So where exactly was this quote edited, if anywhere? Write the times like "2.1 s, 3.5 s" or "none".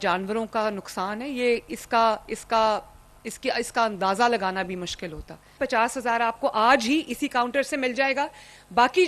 5.6 s